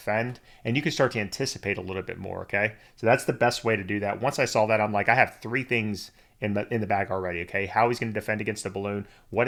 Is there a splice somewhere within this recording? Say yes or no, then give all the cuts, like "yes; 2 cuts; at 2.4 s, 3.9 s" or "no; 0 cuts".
no; 0 cuts